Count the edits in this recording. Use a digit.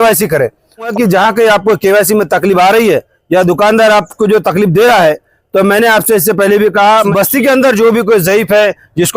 2